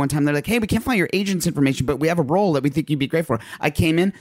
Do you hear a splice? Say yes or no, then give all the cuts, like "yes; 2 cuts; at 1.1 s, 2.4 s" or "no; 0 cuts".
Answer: no; 0 cuts